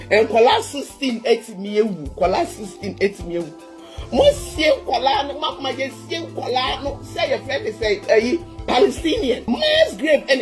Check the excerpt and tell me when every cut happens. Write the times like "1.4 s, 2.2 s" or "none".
9.4 s